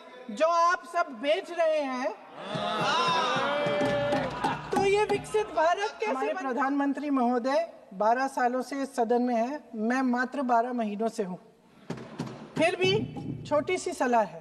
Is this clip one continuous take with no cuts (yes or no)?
no